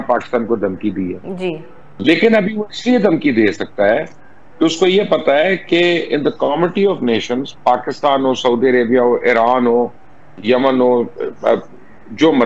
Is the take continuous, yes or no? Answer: yes